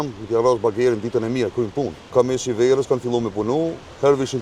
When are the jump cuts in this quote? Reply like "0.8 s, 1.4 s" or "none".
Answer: 2.1 s

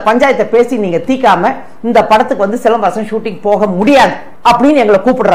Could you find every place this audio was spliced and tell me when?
4.3 s

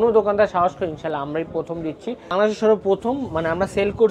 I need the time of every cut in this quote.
2.3 s

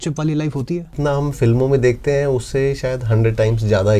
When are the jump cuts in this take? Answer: 1.0 s

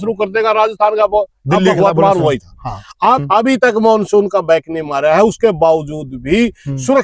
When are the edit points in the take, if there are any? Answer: 3.2 s

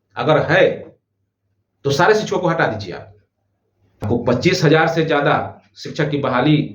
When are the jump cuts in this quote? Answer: 4.0 s

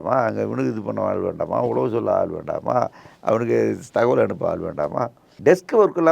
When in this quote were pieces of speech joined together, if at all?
5.2 s

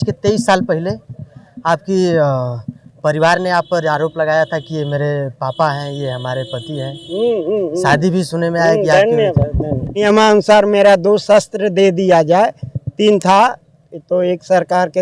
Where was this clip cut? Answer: 9.9 s

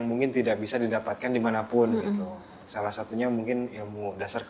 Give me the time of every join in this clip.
none

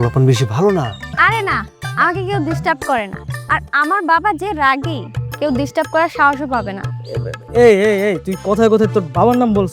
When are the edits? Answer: 1.0 s

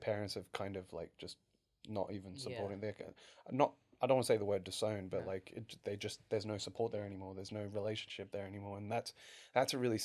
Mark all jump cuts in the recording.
none

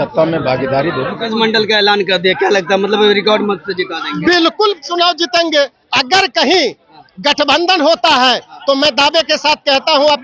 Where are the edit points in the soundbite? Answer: 1.2 s

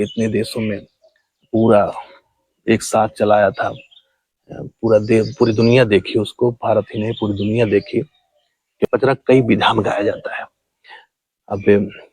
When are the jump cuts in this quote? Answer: 8.8 s

